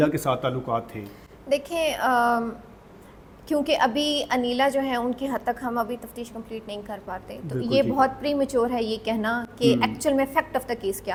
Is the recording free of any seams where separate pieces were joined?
yes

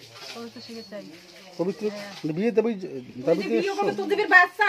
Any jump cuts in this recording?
yes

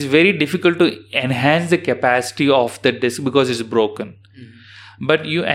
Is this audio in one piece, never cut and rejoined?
yes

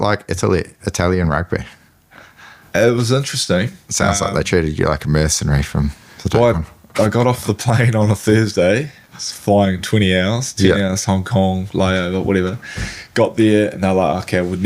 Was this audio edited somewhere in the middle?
no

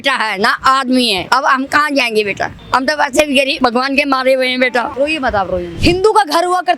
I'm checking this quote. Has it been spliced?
yes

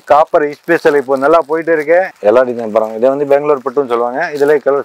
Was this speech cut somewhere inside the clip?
yes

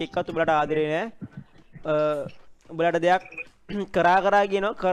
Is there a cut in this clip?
no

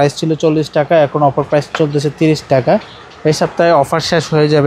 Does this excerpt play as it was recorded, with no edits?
yes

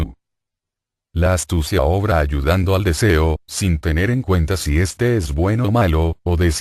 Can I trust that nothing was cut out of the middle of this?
no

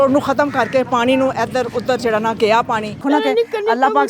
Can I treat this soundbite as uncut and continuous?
no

